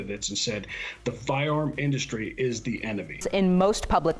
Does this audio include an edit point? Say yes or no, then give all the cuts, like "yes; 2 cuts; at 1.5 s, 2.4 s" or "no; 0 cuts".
yes; 1 cut; at 3.1 s